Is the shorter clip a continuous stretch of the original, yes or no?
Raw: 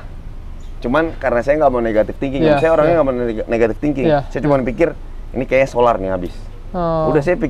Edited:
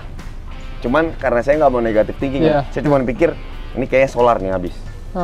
no